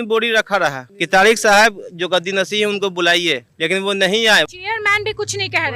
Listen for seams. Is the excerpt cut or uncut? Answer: cut